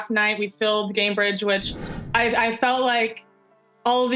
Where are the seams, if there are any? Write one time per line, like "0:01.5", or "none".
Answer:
0:01.9

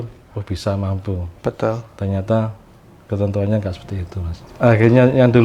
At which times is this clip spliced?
0:04.5

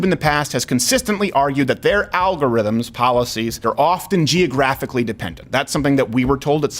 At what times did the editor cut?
0:03.6

